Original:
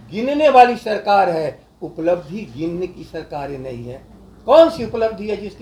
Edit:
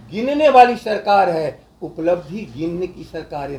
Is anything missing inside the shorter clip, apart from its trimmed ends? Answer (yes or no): no